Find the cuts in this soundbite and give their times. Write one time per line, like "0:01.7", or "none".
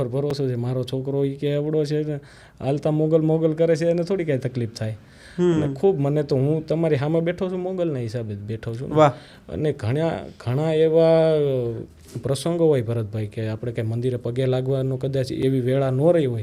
none